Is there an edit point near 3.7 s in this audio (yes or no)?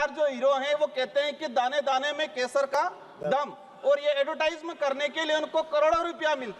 no